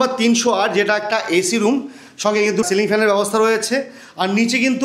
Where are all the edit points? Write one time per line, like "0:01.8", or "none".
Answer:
0:02.7